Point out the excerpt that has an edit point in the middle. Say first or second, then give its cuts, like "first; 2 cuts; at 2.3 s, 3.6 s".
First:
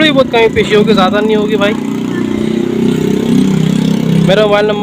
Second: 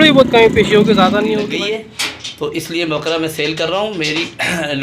second; 1 cut; at 1.4 s